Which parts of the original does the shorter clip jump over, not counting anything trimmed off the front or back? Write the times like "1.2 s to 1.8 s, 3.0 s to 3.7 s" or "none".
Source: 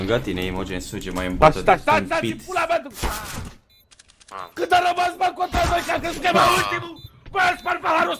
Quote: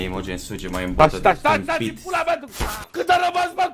3.2 s to 4.4 s